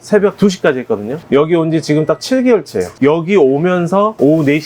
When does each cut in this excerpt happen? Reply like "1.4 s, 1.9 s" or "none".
1.2 s, 3.0 s